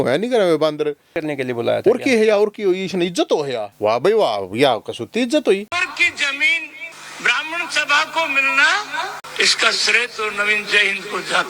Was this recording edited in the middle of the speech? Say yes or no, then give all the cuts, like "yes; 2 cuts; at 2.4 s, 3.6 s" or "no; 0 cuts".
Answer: yes; 2 cuts; at 1.2 s, 5.7 s